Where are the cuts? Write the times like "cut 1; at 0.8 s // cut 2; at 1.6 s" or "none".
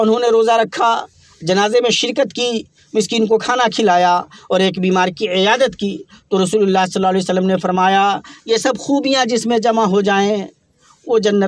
none